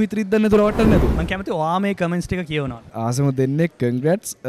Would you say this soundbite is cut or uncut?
cut